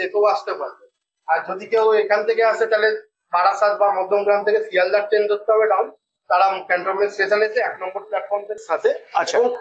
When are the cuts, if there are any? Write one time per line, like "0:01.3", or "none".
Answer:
0:08.6